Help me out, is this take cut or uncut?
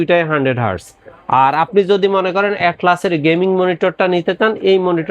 uncut